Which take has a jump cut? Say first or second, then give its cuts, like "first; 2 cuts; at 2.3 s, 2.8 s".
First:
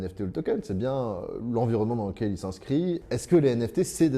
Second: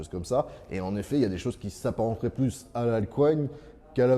first; 1 cut; at 3.0 s